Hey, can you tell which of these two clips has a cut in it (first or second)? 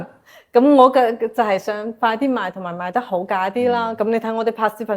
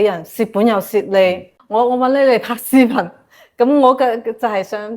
second